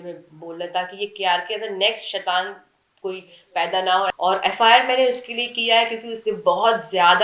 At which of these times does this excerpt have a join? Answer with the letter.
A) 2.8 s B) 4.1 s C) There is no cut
B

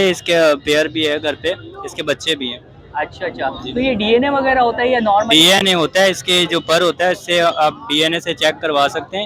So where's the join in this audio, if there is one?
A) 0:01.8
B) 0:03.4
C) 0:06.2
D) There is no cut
D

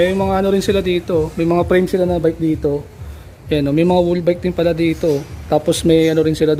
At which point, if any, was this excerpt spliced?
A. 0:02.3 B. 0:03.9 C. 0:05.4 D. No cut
D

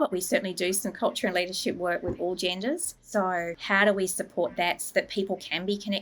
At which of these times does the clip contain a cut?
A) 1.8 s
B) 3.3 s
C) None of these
B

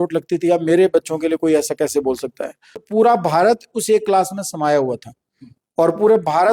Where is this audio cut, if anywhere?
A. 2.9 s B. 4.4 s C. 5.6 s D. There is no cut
A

